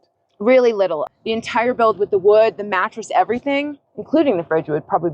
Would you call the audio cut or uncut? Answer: cut